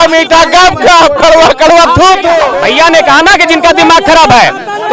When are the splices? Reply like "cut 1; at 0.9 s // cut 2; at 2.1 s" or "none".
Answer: cut 1; at 2.5 s